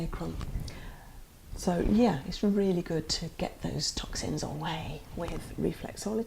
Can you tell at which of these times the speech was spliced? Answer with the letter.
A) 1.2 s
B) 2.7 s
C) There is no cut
A